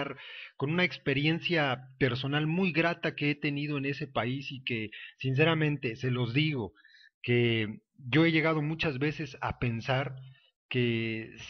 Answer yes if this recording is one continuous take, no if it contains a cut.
no